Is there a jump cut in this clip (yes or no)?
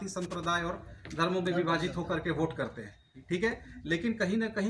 no